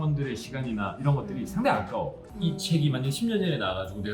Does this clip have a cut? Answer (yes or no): yes